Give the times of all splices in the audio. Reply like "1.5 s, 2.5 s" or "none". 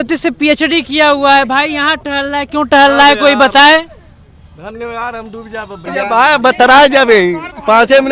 5.9 s